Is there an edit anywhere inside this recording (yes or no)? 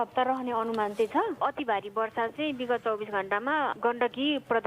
yes